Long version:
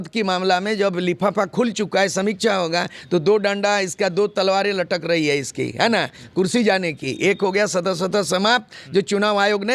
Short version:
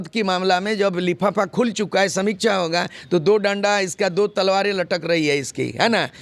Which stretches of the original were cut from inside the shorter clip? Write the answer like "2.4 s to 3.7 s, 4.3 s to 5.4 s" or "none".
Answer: none